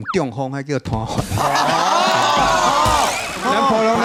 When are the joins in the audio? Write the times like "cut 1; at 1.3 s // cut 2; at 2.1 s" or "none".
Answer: none